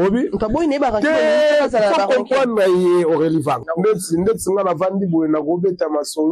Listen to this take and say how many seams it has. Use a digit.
1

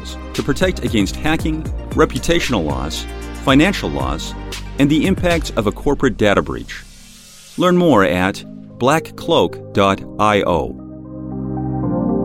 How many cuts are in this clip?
1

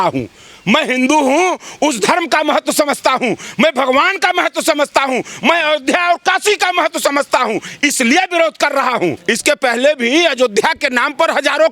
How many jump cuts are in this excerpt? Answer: 1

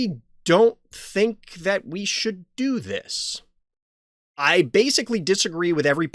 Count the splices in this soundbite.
0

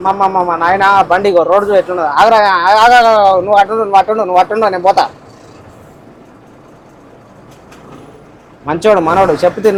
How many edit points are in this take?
0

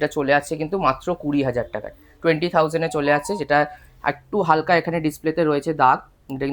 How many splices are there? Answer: 0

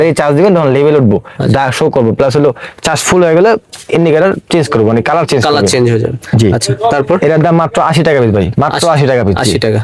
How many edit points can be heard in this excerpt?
0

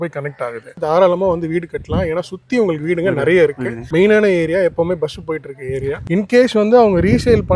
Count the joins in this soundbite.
2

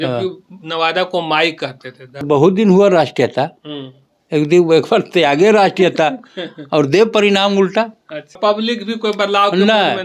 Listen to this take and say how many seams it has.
2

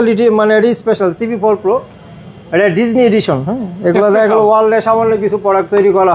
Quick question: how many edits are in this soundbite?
0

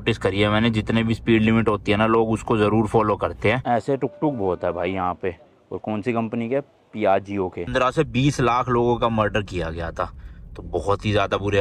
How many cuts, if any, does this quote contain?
2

